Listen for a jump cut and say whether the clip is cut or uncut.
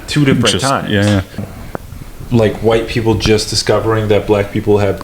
cut